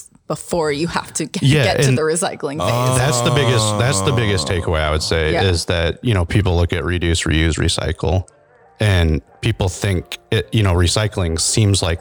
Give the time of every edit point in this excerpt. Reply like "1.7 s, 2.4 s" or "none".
none